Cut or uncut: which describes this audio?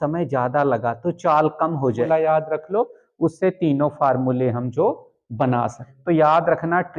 cut